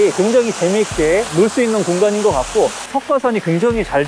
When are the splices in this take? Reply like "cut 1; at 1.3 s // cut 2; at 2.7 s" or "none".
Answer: cut 1; at 2.9 s